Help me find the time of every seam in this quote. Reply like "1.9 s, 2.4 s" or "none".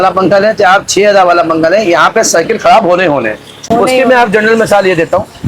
none